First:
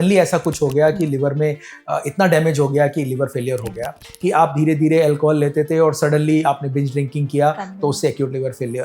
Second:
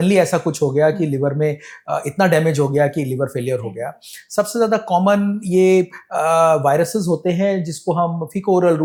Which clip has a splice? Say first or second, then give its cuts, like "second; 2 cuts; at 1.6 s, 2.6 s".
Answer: first; 1 cut; at 4.0 s